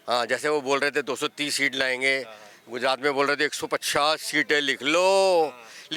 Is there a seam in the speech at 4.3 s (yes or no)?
no